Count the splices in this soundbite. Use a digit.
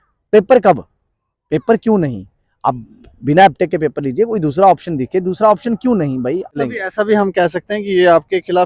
1